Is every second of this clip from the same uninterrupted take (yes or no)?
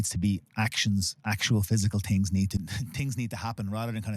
no